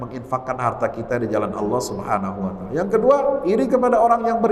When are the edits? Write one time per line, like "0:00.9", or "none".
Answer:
none

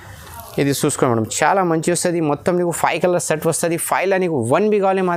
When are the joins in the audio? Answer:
none

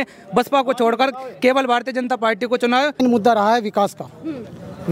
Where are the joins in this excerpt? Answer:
0:03.0

